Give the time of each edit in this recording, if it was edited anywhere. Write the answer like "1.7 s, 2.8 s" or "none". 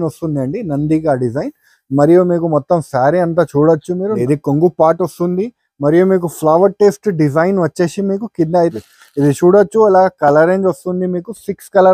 4.2 s, 8.8 s